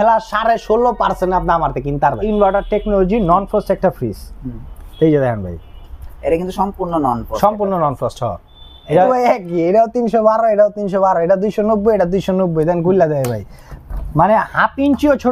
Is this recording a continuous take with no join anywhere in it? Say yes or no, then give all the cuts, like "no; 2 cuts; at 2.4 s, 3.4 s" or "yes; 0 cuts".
no; 2 cuts; at 2.2 s, 9.1 s